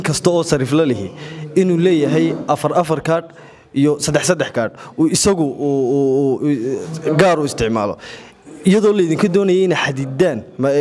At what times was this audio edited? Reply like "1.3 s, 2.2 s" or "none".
none